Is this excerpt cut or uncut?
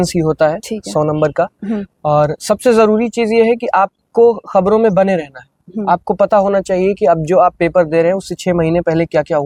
uncut